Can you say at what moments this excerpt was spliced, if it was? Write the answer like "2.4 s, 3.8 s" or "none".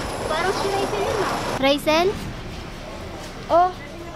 1.6 s